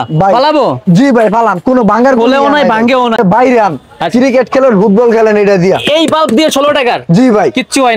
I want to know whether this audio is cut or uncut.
cut